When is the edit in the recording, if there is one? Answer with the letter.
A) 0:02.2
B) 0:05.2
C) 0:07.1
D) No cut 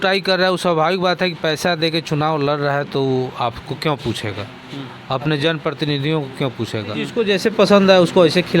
C